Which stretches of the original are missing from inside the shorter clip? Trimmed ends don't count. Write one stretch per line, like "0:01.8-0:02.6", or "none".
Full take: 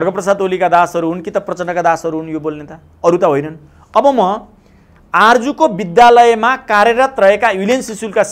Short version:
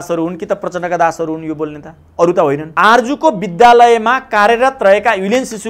0:03.5-0:05.0